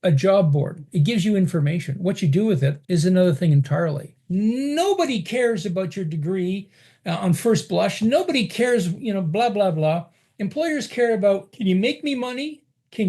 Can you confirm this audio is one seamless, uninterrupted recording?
no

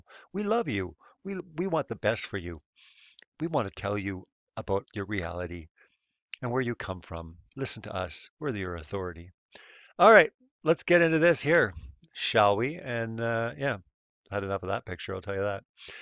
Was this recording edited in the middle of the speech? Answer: yes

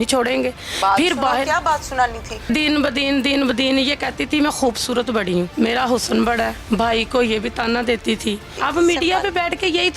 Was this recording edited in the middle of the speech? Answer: yes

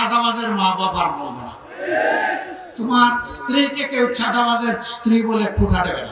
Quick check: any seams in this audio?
no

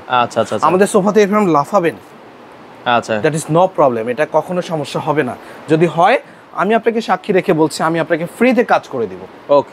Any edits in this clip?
no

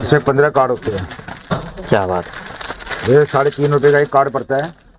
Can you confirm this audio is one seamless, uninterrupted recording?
yes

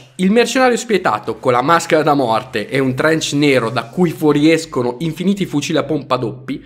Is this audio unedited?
no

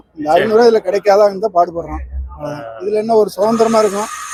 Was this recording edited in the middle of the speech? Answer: no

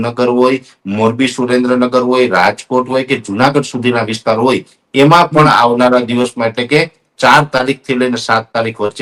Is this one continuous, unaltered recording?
yes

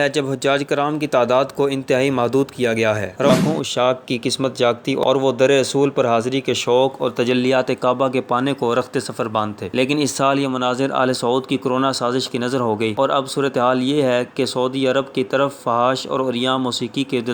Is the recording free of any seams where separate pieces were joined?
no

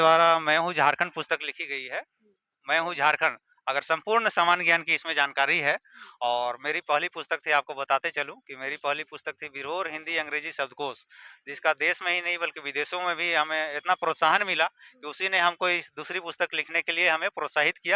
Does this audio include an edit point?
no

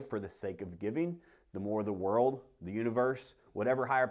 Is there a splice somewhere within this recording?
no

